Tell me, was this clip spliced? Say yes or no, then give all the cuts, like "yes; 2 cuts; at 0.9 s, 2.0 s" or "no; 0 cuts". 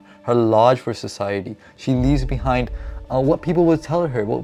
no; 0 cuts